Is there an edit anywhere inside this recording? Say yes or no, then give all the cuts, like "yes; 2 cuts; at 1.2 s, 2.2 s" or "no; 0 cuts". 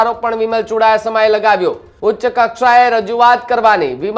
yes; 1 cut; at 1.9 s